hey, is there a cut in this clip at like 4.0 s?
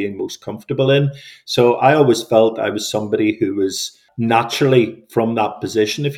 yes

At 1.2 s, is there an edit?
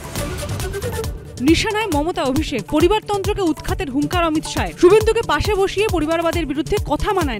no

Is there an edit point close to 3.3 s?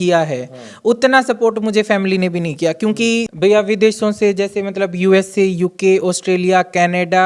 yes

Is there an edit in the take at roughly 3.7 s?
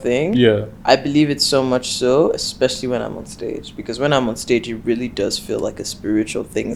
no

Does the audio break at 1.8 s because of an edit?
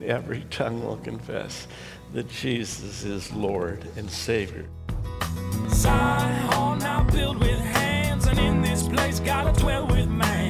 no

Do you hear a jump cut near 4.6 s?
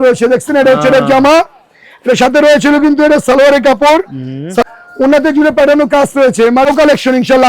yes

